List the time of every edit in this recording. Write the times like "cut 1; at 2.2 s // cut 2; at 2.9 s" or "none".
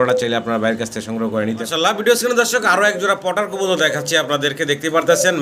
cut 1; at 1.6 s